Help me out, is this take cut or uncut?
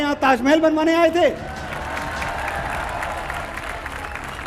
uncut